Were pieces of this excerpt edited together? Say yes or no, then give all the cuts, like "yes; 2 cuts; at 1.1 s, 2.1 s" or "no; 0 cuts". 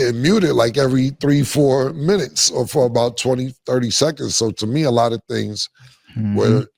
no; 0 cuts